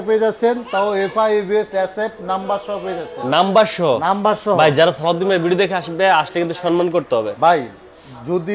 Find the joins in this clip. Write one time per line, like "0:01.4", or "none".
none